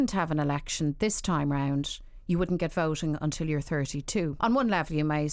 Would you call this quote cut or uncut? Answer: cut